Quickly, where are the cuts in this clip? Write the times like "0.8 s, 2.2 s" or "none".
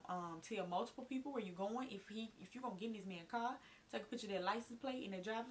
none